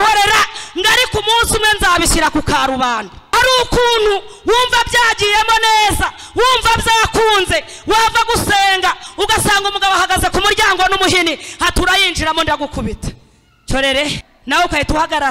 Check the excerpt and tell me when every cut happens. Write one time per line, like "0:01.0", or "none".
0:03.3